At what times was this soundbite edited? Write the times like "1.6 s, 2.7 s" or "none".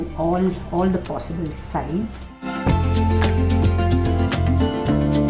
none